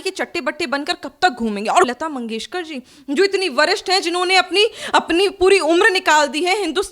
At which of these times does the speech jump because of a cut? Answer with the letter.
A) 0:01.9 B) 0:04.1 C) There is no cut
A